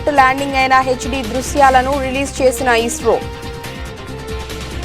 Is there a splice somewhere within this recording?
yes; 1 cut; at 3.2 s

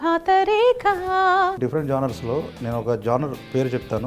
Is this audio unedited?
no; 1 cut; at 1.6 s

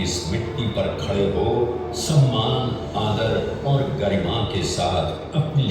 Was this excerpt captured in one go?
yes; 0 cuts

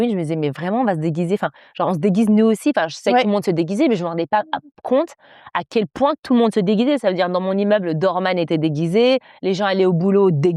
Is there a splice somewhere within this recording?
no; 0 cuts

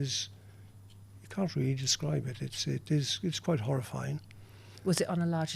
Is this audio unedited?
yes; 0 cuts

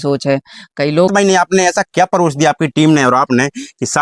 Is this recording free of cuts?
no; 1 cut; at 1.1 s

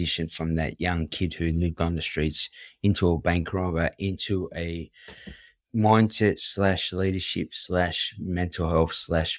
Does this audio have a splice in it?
yes; 1 cut; at 5.5 s

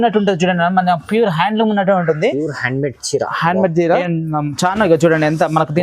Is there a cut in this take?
yes; 1 cut; at 4.0 s

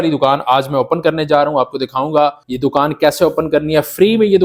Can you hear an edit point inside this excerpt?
no; 0 cuts

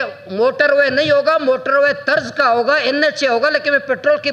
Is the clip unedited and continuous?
yes; 0 cuts

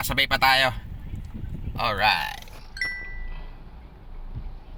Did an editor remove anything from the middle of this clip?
no; 0 cuts

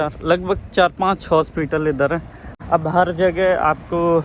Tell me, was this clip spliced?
yes; 1 cut; at 2.5 s

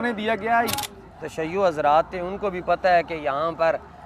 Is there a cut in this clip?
yes; 1 cut; at 0.9 s

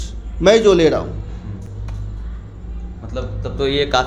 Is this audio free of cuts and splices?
yes; 0 cuts

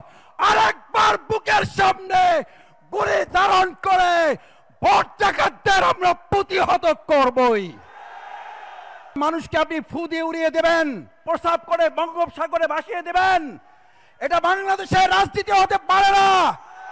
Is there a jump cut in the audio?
yes; 2 cuts; at 9.2 s, 11.2 s

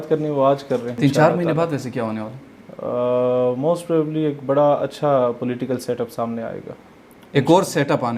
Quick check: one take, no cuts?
no; 1 cut; at 1.0 s

